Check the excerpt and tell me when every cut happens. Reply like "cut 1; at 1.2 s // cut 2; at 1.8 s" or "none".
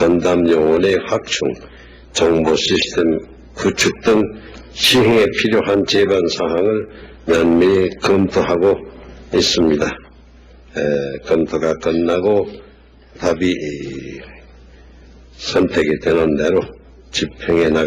cut 1; at 16.3 s